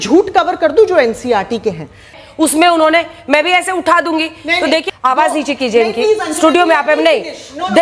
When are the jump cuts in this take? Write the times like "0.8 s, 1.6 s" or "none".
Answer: 2.2 s, 4.8 s